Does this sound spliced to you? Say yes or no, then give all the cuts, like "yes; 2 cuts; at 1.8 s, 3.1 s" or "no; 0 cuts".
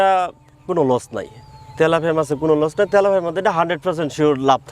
no; 0 cuts